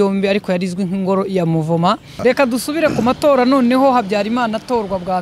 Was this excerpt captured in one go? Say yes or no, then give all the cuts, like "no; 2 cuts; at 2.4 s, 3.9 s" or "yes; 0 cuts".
no; 1 cut; at 2.1 s